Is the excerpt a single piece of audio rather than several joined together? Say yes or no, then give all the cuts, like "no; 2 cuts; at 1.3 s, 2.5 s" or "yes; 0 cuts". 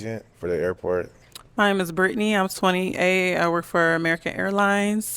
no; 1 cut; at 1.2 s